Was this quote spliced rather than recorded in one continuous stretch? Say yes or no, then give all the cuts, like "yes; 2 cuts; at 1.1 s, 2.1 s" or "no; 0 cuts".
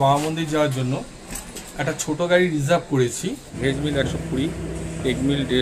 yes; 1 cut; at 3.5 s